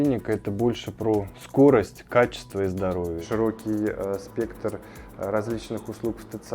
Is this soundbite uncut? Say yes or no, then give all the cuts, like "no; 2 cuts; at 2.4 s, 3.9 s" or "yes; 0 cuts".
no; 1 cut; at 3.2 s